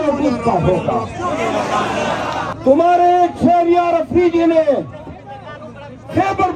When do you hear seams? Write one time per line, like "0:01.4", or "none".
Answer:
0:02.5